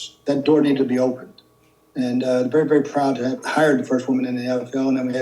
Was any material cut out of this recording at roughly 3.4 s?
yes; 1 cut; at 3.4 s

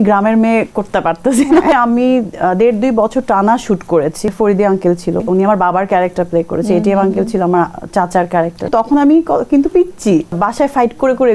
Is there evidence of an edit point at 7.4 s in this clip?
no; 5 cuts; at 1.7 s, 4.3 s, 5.2 s, 8.7 s, 10.3 s

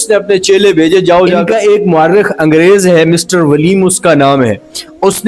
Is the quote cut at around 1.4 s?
yes; 1 cut; at 1.4 s

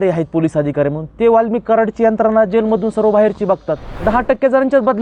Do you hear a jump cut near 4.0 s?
yes; 1 cut; at 4.0 s

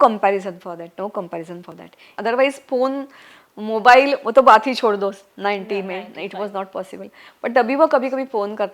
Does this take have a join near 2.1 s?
yes; 1 cut; at 2.1 s

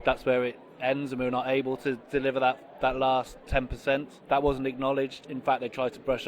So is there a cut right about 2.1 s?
no; 2 cuts; at 3.7 s, 5.3 s

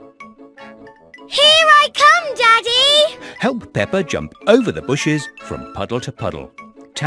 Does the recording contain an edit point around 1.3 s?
yes; 1 cut; at 1.3 s

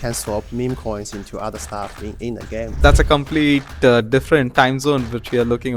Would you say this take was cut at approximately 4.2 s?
no; 1 cut; at 2.7 s

